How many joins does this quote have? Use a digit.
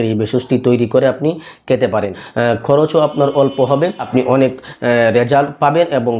2